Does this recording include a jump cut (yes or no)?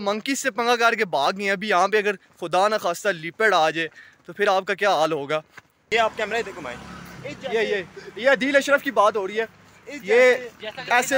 yes